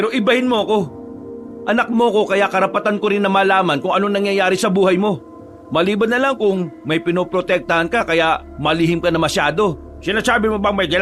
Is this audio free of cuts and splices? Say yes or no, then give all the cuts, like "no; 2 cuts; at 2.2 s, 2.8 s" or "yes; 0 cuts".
yes; 0 cuts